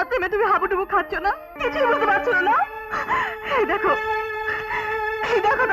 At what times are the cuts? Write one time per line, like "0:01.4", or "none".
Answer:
0:01.5